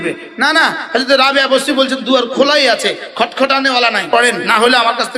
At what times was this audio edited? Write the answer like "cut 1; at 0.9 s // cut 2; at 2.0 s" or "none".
cut 1; at 4.1 s